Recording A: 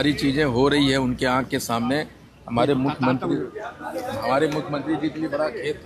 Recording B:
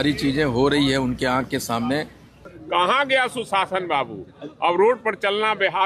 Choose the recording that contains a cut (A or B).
B